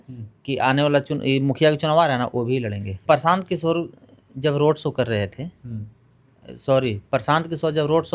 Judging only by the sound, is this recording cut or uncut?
cut